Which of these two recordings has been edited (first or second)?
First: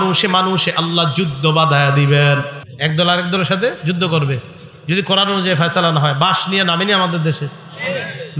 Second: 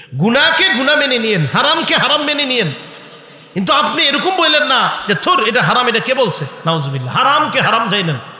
first